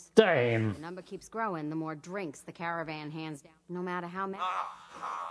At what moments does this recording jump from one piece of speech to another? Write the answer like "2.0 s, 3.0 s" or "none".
none